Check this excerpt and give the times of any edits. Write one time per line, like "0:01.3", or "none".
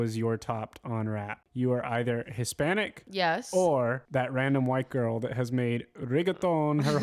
0:01.4
0:03.0
0:04.0